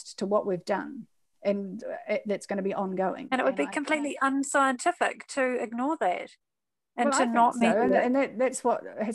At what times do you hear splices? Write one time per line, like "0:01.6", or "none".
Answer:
0:03.2